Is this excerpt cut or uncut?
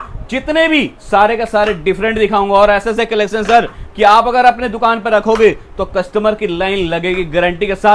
uncut